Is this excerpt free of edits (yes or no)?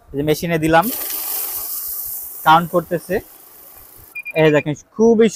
yes